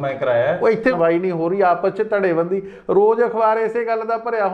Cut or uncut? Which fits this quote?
cut